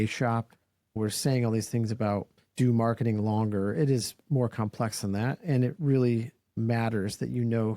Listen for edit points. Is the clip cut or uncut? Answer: cut